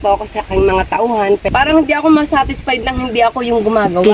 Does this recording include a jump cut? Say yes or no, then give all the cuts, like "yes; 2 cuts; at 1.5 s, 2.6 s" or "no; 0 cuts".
yes; 1 cut; at 1.5 s